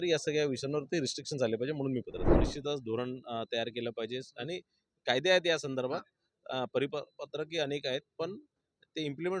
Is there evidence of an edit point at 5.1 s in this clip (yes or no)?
no